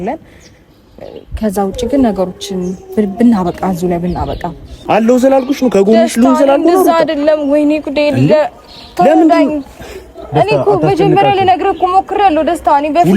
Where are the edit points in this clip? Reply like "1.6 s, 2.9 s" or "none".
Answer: 4.7 s

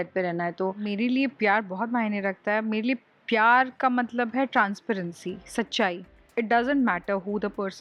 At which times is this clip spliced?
0.8 s, 6.2 s

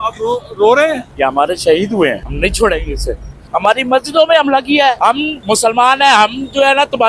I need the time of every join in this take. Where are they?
1.1 s, 2.3 s, 3.4 s, 5.1 s

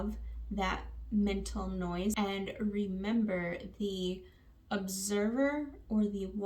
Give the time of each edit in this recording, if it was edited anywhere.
2.1 s

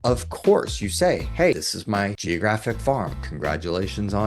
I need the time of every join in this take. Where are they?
3.2 s

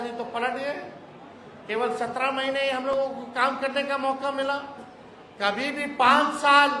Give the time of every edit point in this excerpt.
none

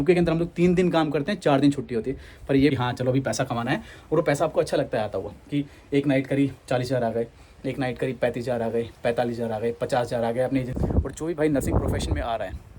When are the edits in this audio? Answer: 2.7 s, 10.7 s

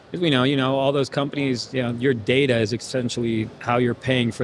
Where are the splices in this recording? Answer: 1.7 s

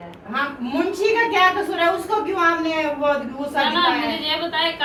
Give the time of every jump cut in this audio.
none

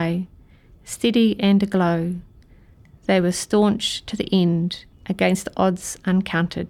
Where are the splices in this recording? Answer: 4.9 s

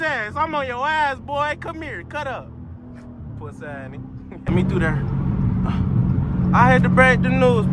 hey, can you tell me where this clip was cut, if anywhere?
4.5 s

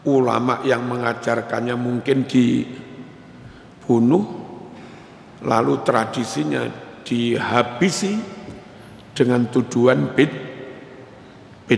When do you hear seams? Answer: none

